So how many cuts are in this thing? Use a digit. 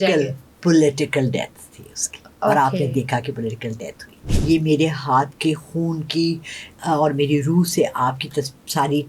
1